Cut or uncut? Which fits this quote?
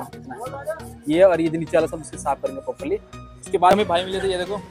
cut